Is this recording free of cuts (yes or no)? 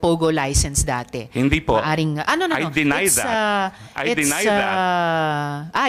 yes